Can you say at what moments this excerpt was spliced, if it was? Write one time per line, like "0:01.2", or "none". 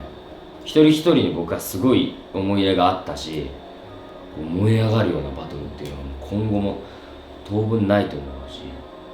0:04.0